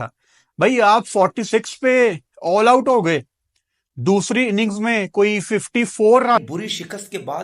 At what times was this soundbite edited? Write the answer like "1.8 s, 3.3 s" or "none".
6.4 s